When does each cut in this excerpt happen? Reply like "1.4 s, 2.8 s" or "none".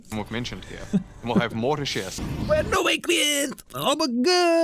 2.1 s